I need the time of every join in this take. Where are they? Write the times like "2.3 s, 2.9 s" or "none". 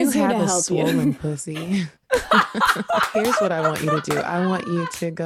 4.1 s